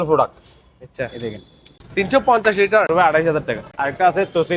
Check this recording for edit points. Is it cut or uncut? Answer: cut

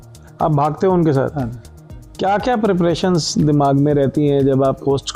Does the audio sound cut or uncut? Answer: cut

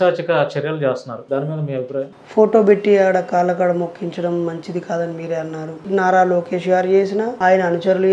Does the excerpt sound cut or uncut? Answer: cut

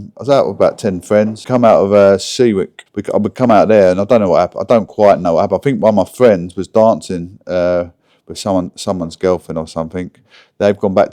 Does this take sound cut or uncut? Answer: cut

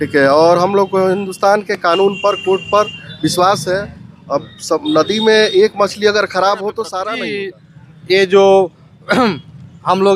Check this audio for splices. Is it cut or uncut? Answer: cut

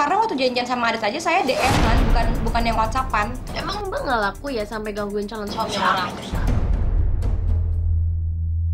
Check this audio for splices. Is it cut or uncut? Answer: uncut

